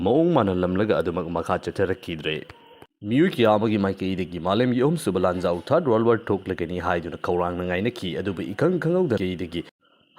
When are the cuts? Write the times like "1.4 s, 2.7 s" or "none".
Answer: 9.2 s

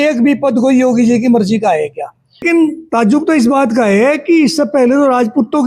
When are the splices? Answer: 2.4 s

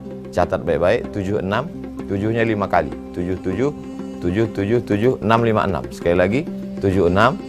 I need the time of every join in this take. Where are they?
5.9 s

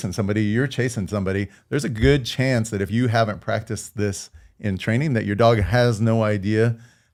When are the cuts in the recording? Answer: none

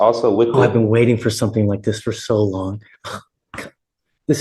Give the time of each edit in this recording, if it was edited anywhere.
none

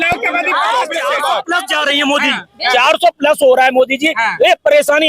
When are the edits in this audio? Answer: 1.1 s

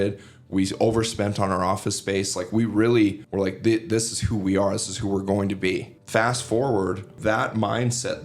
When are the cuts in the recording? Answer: 3.2 s, 5.9 s, 7.1 s

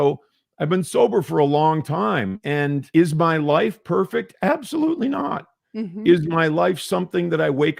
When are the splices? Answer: 2.8 s

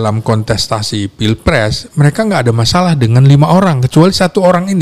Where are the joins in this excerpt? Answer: none

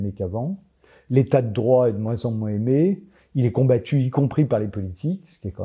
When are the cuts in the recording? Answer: none

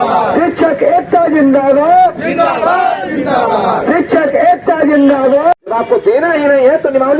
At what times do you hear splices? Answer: 5.7 s

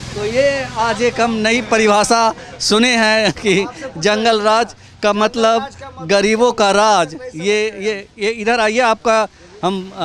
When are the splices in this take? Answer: none

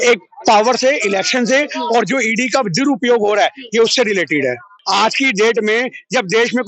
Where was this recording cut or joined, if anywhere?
4.7 s

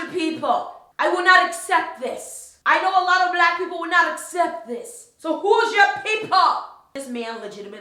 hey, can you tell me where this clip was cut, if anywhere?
none

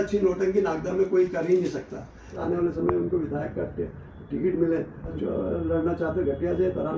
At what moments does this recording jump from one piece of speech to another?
2.3 s, 5.1 s

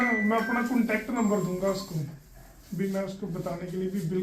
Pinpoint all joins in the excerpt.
none

